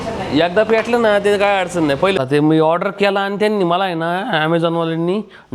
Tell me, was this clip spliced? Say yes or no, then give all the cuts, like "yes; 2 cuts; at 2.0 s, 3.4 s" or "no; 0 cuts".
yes; 1 cut; at 2.2 s